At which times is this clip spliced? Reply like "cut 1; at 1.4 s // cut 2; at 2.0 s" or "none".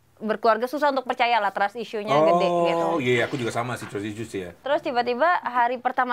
cut 1; at 4.6 s